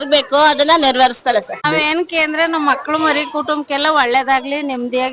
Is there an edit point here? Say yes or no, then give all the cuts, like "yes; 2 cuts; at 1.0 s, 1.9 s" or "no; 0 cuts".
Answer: yes; 1 cut; at 1.6 s